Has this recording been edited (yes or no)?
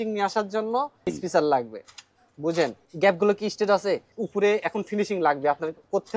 yes